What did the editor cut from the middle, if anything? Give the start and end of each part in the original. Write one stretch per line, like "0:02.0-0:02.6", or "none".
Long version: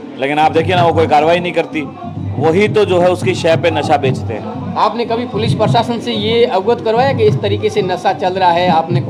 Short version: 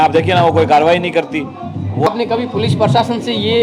0:02.5-0:04.9